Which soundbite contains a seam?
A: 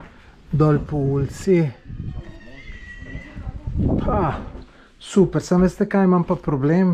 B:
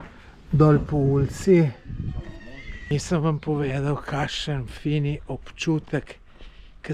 B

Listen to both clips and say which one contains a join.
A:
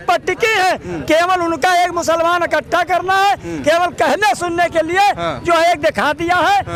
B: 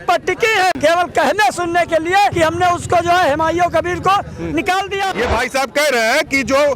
B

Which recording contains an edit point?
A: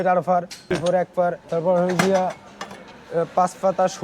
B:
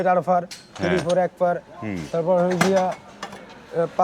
A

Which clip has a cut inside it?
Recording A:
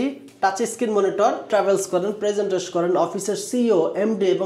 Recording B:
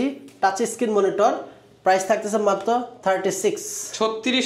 A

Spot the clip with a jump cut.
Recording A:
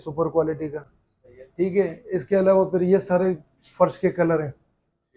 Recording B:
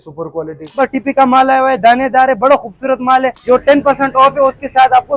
B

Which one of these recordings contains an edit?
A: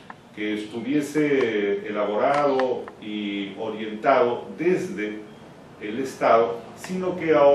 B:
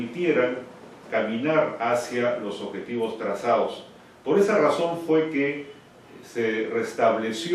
B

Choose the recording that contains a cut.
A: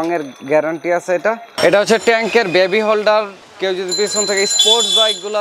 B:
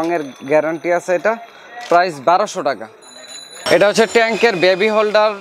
A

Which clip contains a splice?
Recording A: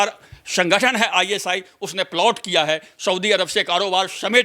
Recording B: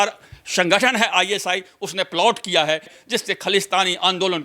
B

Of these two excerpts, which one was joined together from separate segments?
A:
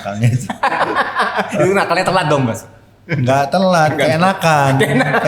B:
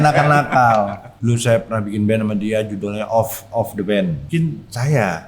B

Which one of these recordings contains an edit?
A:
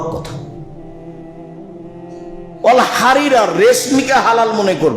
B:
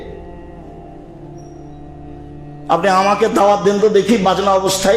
A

